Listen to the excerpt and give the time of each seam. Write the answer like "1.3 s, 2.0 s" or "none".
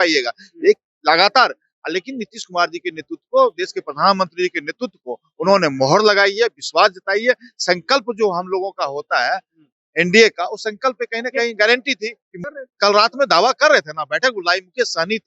12.3 s